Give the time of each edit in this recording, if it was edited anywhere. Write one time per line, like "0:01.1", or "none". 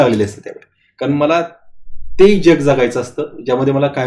none